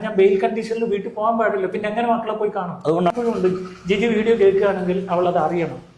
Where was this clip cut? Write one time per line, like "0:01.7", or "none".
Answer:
0:03.1